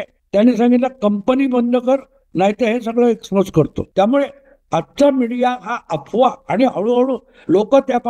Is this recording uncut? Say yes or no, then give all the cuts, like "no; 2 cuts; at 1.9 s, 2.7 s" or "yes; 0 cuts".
no; 1 cut; at 3.8 s